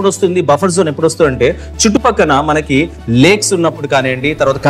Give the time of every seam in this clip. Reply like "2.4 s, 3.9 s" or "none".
none